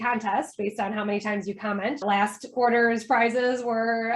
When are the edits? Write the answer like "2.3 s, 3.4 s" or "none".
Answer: 2.0 s